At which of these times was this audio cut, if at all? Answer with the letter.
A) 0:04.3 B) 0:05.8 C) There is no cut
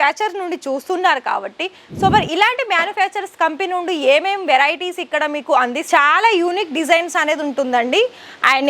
B